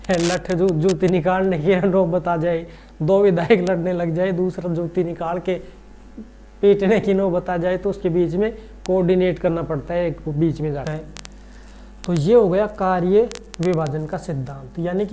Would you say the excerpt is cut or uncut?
cut